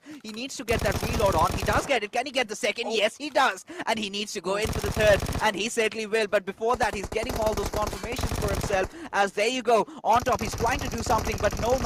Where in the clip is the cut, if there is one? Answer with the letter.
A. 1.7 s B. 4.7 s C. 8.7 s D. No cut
D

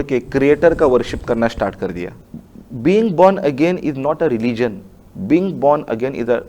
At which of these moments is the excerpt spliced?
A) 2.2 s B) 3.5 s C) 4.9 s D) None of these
A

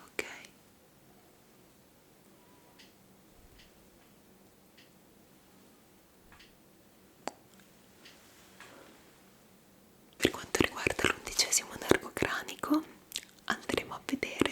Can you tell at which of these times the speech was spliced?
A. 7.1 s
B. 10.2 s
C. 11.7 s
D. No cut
B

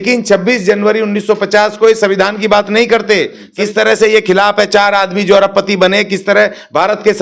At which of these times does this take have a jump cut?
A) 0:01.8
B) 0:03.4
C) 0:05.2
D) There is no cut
B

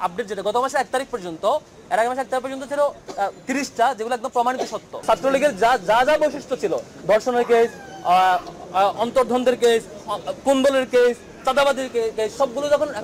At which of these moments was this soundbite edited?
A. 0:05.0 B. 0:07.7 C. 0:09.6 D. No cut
A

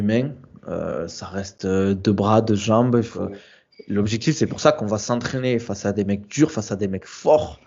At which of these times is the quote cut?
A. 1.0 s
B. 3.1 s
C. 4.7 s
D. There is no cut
B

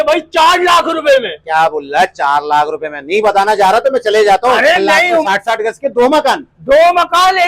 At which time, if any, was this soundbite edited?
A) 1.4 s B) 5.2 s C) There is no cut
B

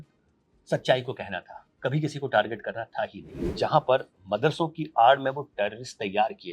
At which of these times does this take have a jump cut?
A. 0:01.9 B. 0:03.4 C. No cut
B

